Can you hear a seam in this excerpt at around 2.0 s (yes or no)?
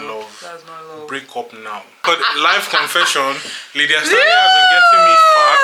yes